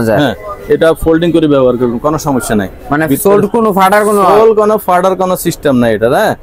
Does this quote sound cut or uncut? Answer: uncut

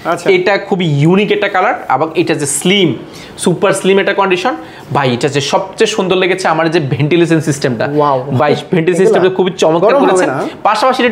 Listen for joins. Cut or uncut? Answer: uncut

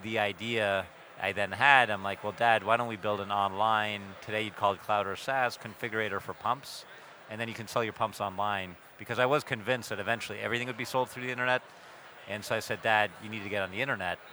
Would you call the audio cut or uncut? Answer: uncut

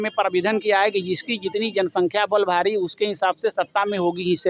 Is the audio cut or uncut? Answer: uncut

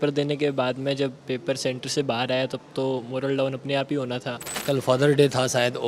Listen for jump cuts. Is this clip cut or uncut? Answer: cut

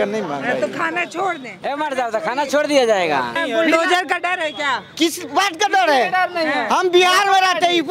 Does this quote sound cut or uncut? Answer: cut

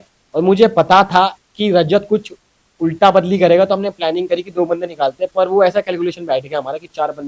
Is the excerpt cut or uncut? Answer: uncut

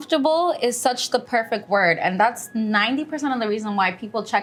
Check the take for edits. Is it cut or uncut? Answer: uncut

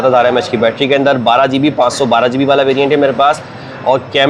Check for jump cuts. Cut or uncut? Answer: uncut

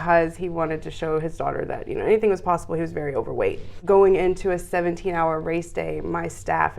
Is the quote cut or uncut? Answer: cut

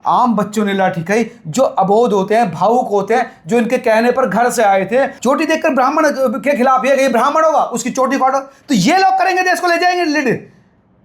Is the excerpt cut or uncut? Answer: cut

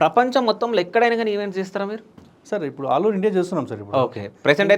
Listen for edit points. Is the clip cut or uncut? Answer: uncut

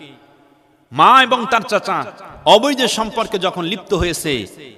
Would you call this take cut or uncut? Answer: uncut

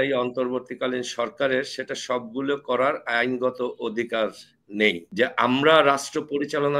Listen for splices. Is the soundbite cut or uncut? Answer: cut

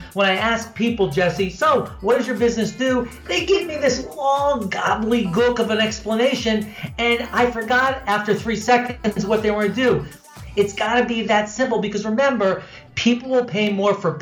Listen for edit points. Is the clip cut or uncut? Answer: cut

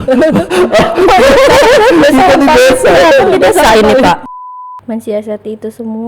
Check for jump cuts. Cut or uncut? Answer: cut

